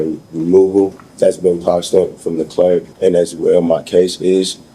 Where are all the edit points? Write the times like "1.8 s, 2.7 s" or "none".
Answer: 1.0 s, 2.9 s